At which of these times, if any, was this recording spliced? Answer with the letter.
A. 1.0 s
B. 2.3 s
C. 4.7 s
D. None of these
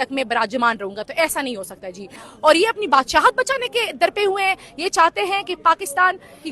B